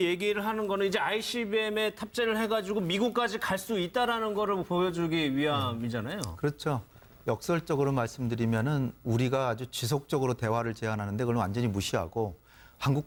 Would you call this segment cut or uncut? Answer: uncut